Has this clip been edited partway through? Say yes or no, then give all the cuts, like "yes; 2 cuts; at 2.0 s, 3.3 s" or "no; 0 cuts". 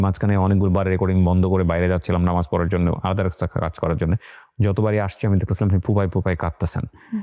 no; 0 cuts